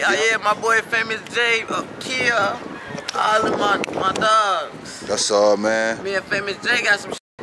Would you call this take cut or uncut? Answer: uncut